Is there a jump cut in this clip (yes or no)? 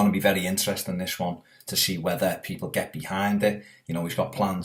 no